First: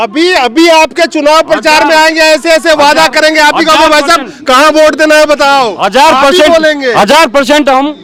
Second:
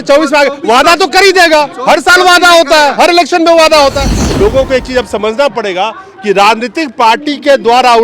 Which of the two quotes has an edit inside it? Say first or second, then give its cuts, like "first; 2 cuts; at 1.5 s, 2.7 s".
second; 1 cut; at 4.2 s